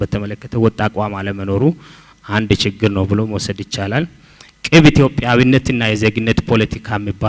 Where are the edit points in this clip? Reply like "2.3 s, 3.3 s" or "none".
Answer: none

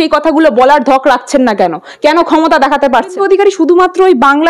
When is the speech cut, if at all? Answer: 3.2 s

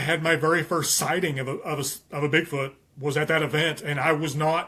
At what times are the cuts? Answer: none

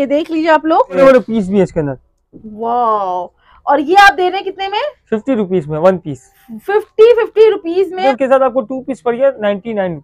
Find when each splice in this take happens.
1.0 s, 8.0 s

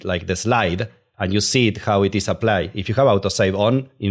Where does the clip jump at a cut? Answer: none

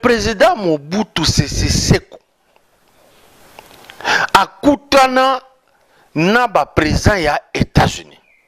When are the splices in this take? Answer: none

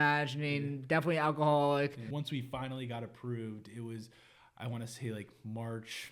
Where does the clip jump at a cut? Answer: 2.0 s

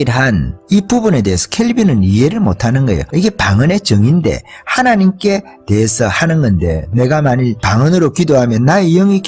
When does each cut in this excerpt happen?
3.0 s, 7.6 s

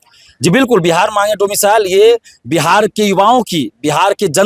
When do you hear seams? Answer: none

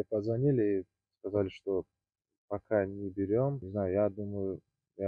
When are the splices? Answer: 3.6 s

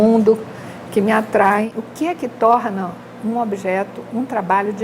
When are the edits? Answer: none

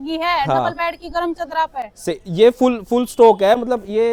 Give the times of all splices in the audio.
none

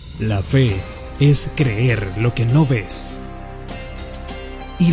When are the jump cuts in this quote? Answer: 1.5 s

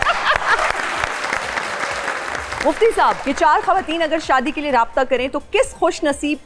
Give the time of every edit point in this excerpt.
2.6 s, 3.2 s

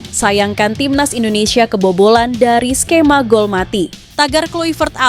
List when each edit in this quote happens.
4.0 s

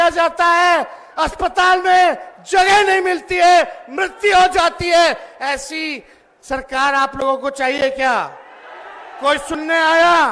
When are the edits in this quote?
none

